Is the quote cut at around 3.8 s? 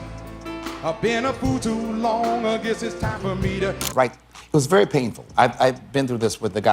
yes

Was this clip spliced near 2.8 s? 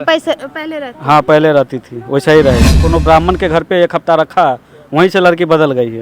yes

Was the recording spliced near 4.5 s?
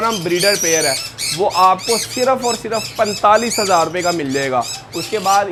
no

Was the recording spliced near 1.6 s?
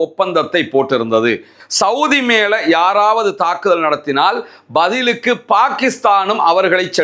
yes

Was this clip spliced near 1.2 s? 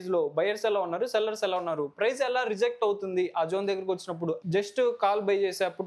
no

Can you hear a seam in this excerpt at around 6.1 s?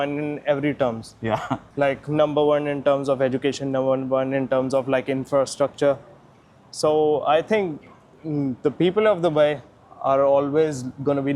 no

